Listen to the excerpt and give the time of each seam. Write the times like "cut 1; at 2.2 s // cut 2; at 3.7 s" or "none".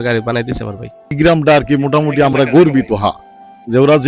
cut 1; at 1.1 s

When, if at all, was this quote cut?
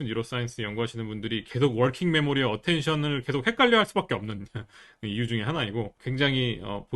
cut 1; at 6.0 s

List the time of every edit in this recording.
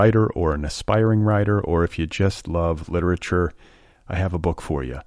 none

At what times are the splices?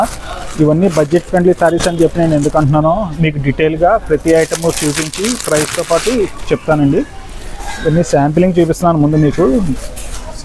none

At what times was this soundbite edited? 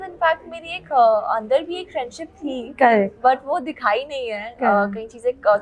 none

